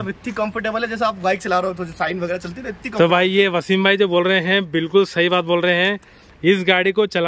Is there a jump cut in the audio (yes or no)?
no